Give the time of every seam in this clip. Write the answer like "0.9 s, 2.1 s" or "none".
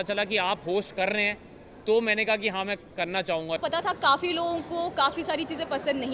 3.6 s